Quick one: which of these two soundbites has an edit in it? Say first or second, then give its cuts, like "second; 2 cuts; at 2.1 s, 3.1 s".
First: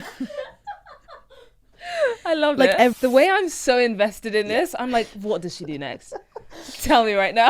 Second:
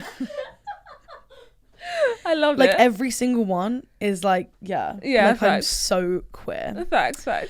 first; 1 cut; at 3.0 s